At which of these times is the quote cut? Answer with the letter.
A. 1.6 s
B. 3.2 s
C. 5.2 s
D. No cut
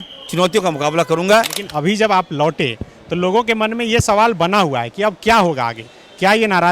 A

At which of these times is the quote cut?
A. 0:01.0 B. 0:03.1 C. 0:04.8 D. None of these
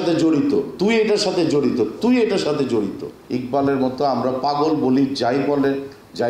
B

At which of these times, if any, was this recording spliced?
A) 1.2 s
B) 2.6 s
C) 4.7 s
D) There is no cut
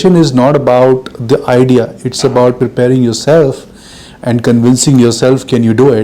B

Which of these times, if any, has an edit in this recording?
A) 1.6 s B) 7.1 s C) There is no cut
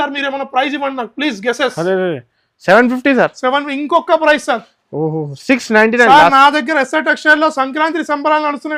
C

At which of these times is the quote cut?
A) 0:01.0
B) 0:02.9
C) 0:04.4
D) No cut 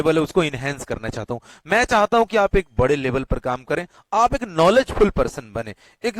D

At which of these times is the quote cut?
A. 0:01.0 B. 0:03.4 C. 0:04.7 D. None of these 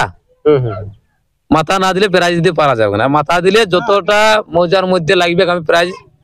D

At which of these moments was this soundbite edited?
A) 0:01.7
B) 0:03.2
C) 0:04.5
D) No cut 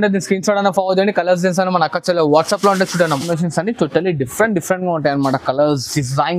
B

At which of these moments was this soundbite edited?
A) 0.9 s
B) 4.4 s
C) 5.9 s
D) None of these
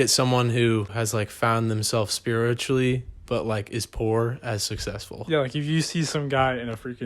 A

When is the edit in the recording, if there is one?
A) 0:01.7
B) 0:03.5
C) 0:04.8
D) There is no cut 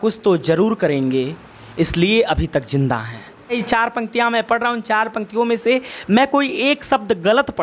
B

